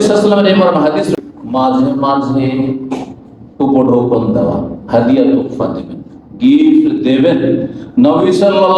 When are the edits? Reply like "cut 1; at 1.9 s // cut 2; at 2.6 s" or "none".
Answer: cut 1; at 1.1 s